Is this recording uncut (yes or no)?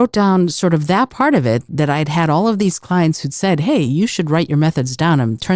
no